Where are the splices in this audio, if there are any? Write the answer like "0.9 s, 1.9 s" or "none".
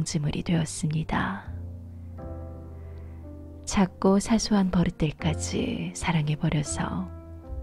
1.4 s, 3.7 s